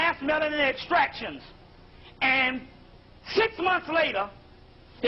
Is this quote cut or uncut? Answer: uncut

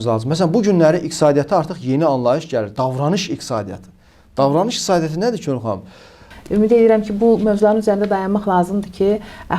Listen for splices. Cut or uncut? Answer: cut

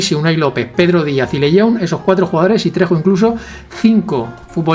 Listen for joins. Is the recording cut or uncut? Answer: uncut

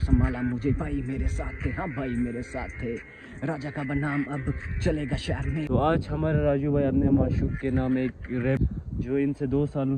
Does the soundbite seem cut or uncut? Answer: cut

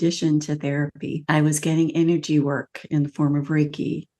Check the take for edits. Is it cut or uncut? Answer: cut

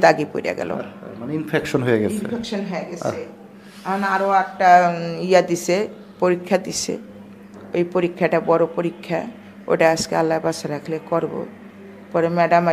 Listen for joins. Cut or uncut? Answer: uncut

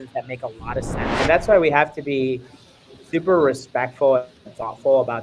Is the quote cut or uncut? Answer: cut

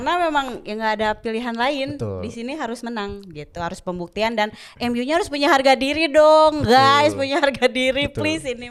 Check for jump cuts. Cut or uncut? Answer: uncut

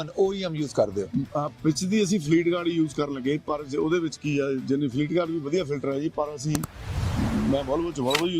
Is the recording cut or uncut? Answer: uncut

